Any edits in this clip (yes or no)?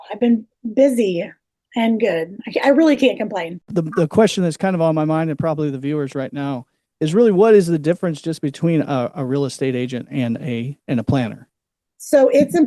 yes